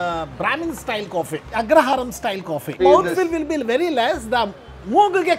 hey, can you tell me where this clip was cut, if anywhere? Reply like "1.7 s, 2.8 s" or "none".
1.5 s, 2.8 s